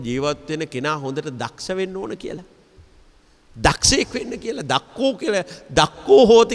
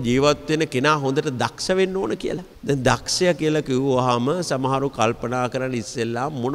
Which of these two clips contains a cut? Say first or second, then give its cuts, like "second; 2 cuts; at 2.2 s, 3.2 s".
second; 1 cut; at 2.5 s